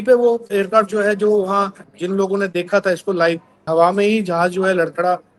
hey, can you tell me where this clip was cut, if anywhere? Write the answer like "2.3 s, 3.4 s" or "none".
1.8 s, 3.6 s